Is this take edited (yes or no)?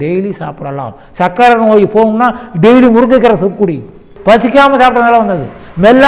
yes